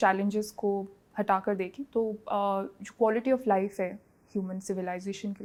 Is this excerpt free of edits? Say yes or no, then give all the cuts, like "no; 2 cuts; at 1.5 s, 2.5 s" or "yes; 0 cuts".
yes; 0 cuts